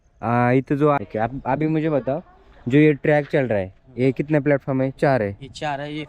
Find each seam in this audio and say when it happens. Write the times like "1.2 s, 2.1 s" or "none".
1.0 s